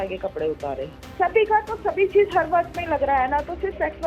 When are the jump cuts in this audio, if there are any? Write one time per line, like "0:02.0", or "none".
0:01.0

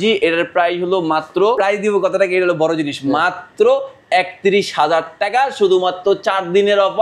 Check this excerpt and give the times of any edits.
0:01.6

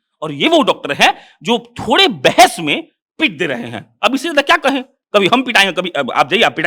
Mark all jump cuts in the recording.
none

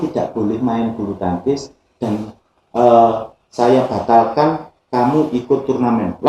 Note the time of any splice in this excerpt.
none

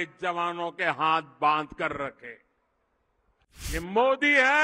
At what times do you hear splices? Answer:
0:03.7

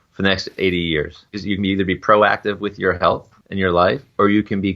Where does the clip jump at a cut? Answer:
0:01.3
0:03.4

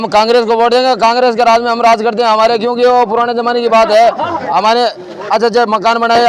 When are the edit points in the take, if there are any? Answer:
none

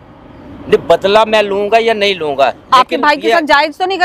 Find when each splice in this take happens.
none

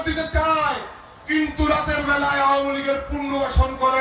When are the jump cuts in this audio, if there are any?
none

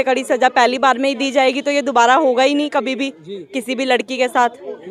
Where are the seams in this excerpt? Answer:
none

